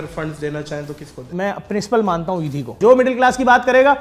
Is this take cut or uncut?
cut